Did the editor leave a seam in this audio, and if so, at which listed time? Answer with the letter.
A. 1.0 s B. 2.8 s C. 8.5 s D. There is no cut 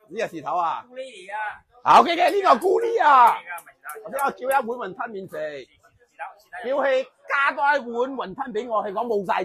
D